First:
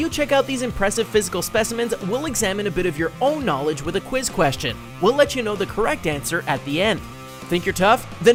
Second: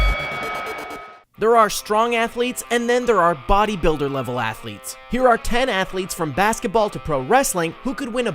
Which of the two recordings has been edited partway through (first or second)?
second